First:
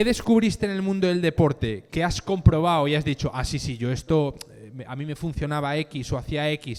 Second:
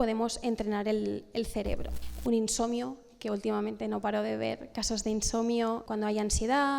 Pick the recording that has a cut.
second; 2 cuts; at 1.9 s, 5.9 s

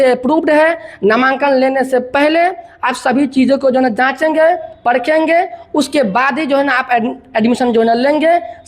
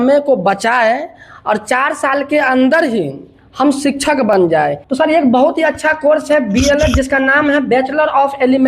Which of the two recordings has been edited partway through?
second; 1 cut; at 4.5 s

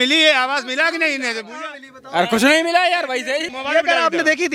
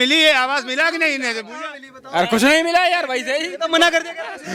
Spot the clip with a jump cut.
first; 1 cut; at 3.5 s

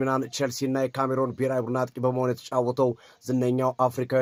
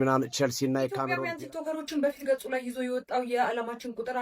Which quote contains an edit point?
second; 1 cut; at 1.0 s

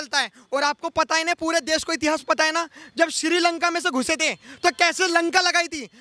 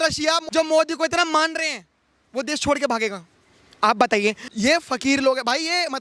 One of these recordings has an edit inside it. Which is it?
second; 2 cuts; at 2.2 s, 4.5 s

